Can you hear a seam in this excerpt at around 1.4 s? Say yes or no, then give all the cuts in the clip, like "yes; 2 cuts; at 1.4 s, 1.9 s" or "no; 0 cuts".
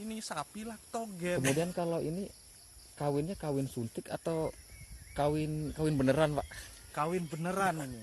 yes; 1 cut; at 1.4 s